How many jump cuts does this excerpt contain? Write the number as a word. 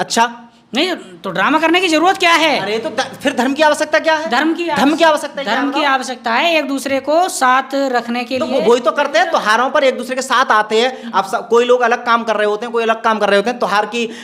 zero